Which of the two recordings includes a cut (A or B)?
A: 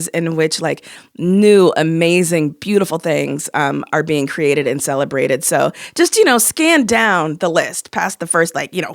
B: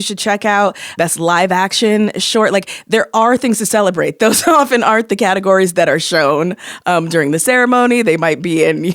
B